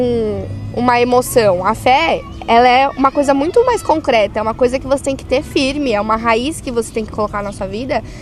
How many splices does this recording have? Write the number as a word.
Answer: zero